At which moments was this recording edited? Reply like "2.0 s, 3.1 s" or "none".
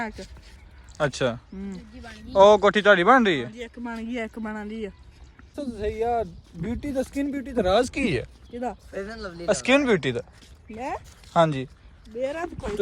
5.6 s